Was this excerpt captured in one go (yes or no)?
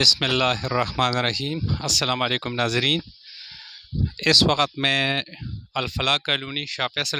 yes